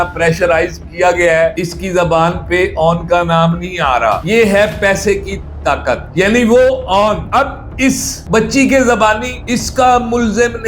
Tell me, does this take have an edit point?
yes; 2 cuts; at 1.5 s, 4.2 s

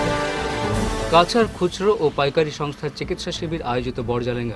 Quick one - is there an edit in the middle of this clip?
yes; 1 cut; at 0.9 s

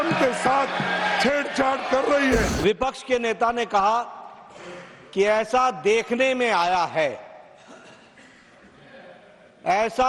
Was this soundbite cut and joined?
yes; 1 cut; at 2.5 s

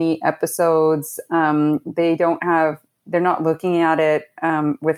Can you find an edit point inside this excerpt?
no; 0 cuts

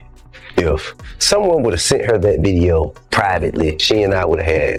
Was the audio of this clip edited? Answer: no; 0 cuts

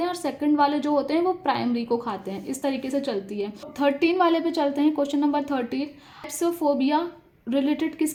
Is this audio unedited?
yes; 0 cuts

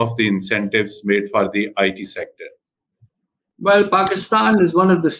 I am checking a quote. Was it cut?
no; 0 cuts

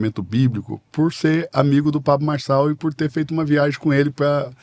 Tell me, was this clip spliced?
no; 0 cuts

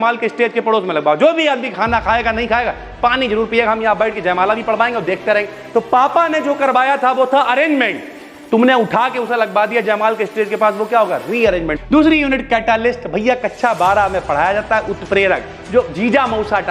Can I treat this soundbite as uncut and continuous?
no; 1 cut; at 11.7 s

